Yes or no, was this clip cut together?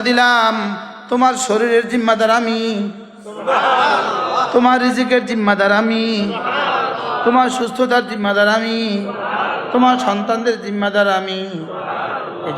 no